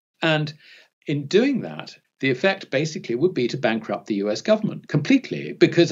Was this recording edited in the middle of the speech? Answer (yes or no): yes